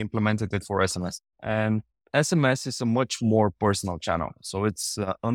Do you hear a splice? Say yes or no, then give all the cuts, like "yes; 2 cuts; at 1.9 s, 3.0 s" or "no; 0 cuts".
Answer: no; 0 cuts